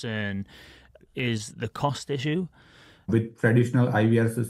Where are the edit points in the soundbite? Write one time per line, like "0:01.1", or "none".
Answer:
0:01.1
0:03.1

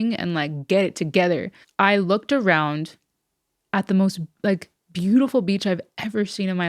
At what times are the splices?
0:01.6

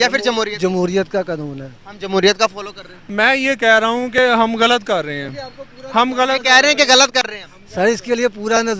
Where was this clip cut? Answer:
none

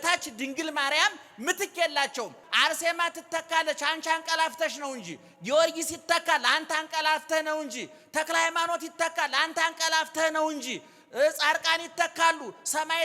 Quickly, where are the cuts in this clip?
0:02.4

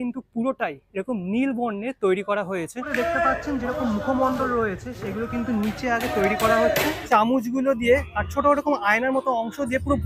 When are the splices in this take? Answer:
0:02.9
0:07.0

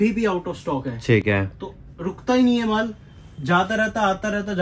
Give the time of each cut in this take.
none

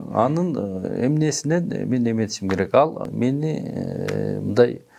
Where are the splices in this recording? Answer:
0:03.1

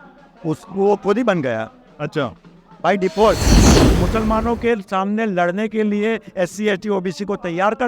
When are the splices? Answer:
0:03.8

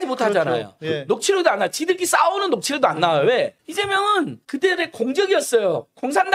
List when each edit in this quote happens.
none

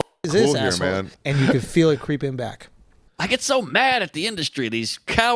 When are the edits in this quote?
0:01.1
0:03.0

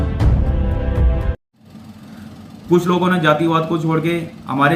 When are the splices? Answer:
none

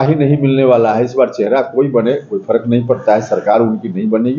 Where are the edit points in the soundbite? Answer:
none

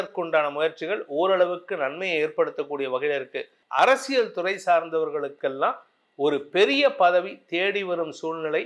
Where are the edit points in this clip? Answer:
0:03.6

